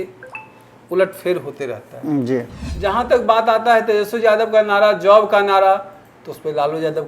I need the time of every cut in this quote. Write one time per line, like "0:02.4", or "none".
0:02.6

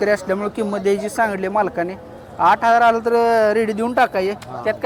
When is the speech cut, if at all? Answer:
none

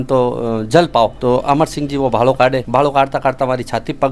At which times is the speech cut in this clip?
0:01.2
0:02.6

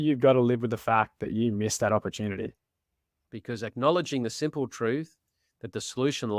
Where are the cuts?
0:02.7

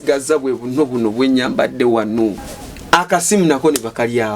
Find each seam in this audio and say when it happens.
0:02.4

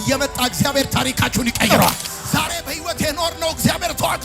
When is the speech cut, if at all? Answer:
0:02.1

